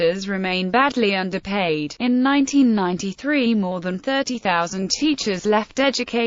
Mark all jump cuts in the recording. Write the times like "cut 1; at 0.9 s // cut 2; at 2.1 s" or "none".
cut 1; at 5.1 s